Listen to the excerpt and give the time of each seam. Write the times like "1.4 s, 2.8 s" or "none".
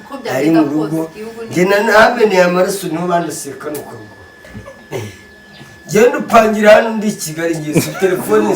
4.4 s